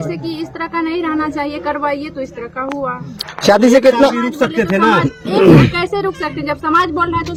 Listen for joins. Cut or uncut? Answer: uncut